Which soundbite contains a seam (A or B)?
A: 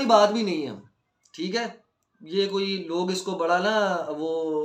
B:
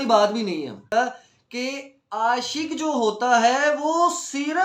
B